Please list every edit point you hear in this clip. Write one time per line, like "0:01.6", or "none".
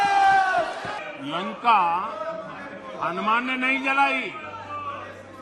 0:00.9